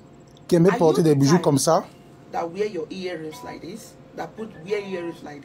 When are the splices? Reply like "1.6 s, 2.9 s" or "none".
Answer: 1.9 s